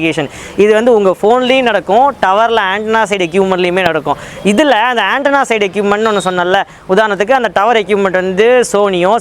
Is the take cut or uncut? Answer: uncut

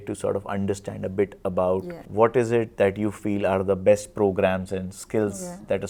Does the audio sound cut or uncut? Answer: uncut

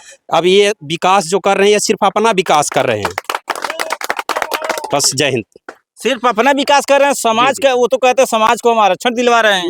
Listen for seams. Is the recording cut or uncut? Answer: uncut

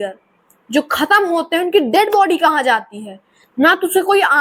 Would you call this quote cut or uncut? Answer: uncut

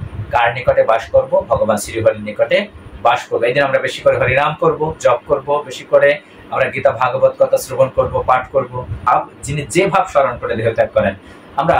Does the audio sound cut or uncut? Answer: cut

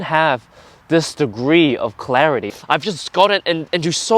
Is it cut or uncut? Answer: cut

